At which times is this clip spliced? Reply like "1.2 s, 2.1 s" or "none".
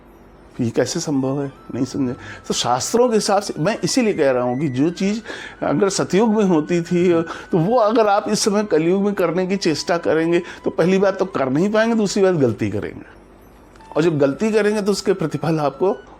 none